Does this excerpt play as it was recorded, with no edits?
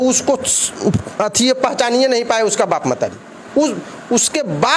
yes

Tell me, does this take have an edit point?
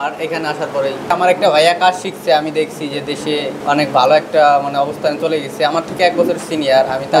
yes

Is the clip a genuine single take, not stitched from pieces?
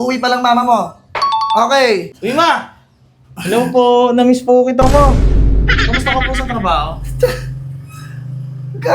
no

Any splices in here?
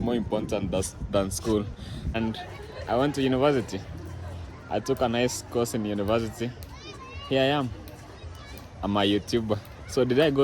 yes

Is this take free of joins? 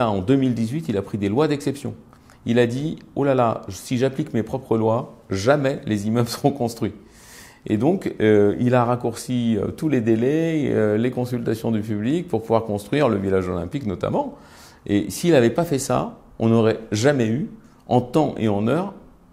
yes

